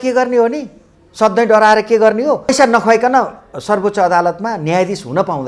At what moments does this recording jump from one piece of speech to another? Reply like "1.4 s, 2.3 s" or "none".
2.5 s